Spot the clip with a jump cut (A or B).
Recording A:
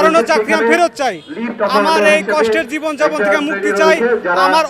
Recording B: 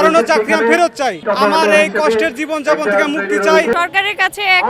B